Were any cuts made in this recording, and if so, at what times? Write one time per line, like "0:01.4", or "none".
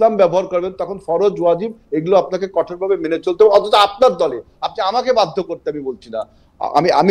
none